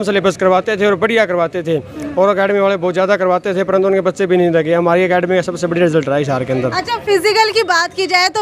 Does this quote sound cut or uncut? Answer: uncut